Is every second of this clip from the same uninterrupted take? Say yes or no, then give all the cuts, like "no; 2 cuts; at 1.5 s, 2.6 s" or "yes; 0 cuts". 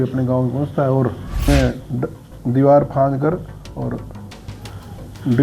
no; 1 cut; at 1.5 s